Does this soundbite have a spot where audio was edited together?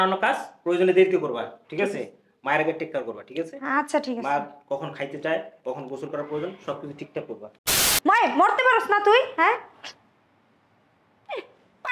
yes; 1 cut; at 7.7 s

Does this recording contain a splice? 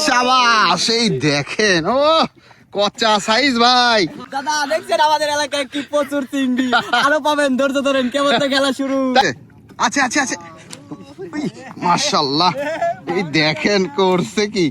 yes; 2 cuts; at 4.3 s, 9.2 s

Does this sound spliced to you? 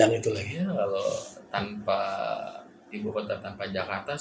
no; 0 cuts

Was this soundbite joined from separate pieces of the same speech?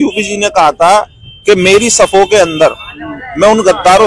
no; 0 cuts

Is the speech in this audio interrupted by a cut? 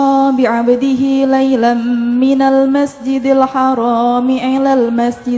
no; 0 cuts

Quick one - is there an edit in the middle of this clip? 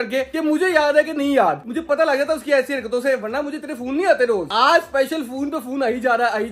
no; 0 cuts

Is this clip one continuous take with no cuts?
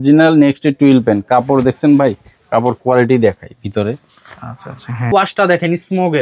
no; 1 cut; at 5.1 s

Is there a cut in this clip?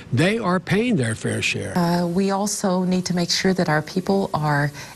yes; 1 cut; at 1.7 s

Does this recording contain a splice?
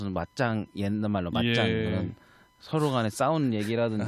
no; 0 cuts

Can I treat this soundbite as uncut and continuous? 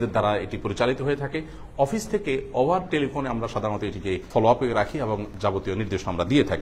yes; 0 cuts

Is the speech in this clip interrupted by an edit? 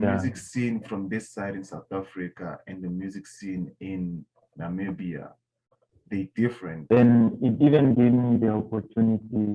yes; 1 cut; at 6.7 s

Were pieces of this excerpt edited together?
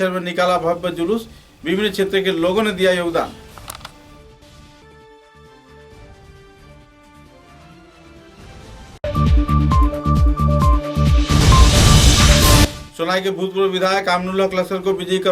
yes; 2 cuts; at 9.0 s, 12.8 s

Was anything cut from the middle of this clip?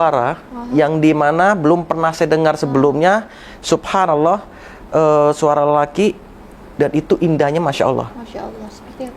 no; 0 cuts

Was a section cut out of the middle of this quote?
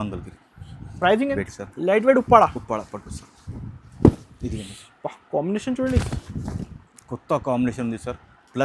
yes; 1 cut; at 1.4 s

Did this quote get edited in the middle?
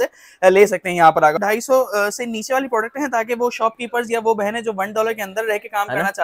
yes; 1 cut; at 1.3 s

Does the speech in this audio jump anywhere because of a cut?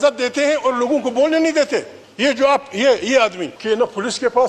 yes; 2 cuts; at 2.0 s, 3.5 s

